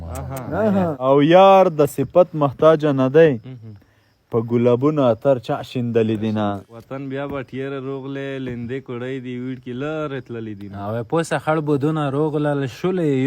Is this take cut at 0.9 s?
yes; 2 cuts; at 0.9 s, 6.7 s

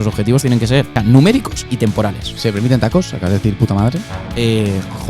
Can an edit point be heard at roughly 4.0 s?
no; 2 cuts; at 0.9 s, 2.3 s

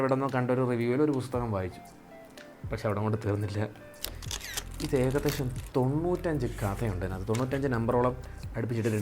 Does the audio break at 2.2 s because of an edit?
no; 1 cut; at 4.0 s

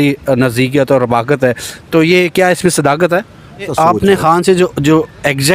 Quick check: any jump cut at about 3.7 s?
yes; 1 cut; at 3.7 s

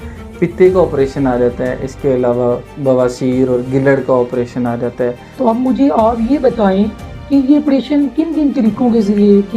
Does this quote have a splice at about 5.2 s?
yes; 1 cut; at 5.2 s

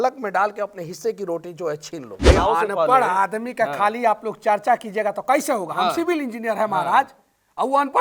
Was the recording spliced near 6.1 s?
no; 1 cut; at 2.2 s

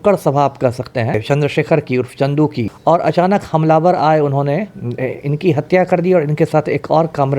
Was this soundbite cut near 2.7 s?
yes; 2 cuts; at 1.2 s, 2.7 s

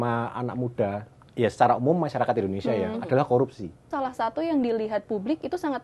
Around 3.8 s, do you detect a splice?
yes; 1 cut; at 3.8 s

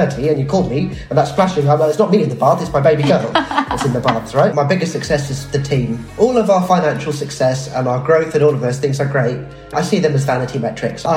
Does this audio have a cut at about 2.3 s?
no; 3 cuts; at 4.5 s, 6.1 s, 9.7 s

